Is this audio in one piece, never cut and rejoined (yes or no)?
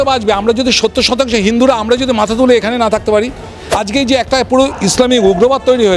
no